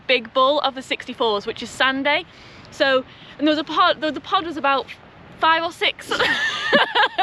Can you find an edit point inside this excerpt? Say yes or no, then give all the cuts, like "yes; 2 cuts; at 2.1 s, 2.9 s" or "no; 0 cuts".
no; 0 cuts